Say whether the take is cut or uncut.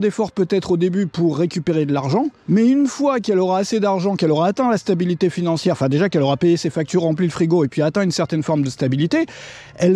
cut